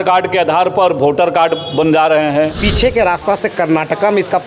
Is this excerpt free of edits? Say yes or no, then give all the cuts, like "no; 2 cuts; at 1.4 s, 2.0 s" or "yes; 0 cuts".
no; 1 cut; at 2.6 s